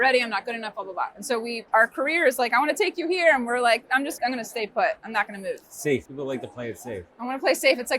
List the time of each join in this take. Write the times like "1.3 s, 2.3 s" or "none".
1.6 s, 4.1 s, 6.1 s

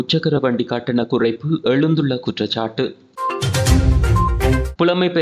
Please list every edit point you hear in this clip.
none

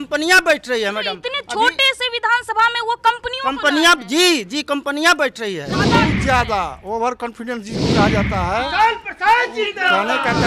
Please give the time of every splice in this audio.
5.9 s

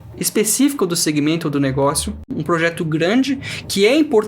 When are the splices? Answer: 2.3 s

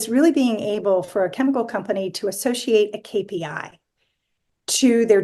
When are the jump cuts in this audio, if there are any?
none

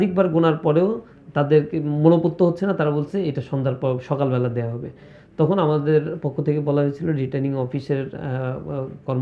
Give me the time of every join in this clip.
none

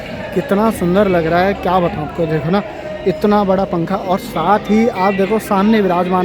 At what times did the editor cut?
none

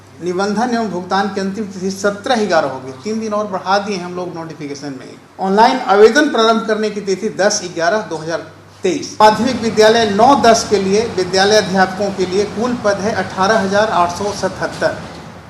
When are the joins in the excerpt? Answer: 5.2 s, 9.2 s

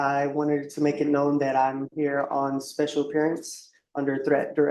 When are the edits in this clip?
none

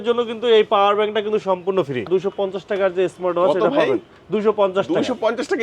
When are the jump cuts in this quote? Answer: 2.1 s

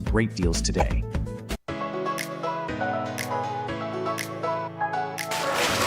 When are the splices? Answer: 1.6 s

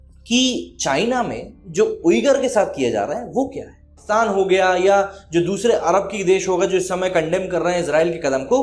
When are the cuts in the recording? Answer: 4.0 s

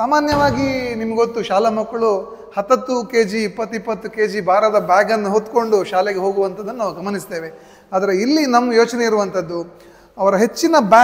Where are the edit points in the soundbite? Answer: none

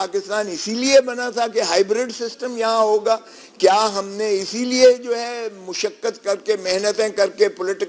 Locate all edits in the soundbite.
none

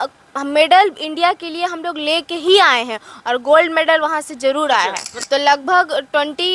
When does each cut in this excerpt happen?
5.1 s

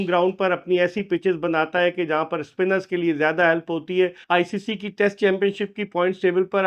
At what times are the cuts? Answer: 4.2 s

